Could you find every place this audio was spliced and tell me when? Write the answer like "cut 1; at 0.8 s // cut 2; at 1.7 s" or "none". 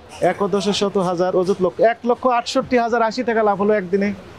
none